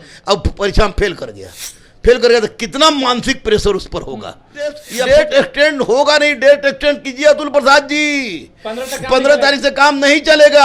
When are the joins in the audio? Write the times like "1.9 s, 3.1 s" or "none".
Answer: 4.9 s